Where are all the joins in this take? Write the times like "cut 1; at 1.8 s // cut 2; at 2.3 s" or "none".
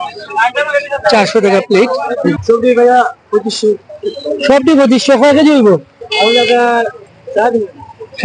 cut 1; at 2.3 s